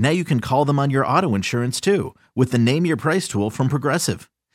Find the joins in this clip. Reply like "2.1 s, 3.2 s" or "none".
none